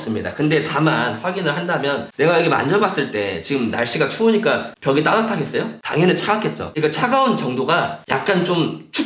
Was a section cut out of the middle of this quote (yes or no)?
no